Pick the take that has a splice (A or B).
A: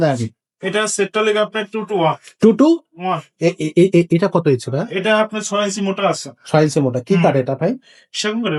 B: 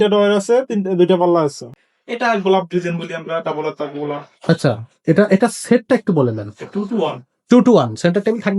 B